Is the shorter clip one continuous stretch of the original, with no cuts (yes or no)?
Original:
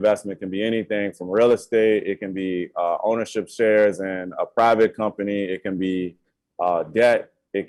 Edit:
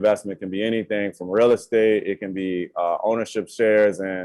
yes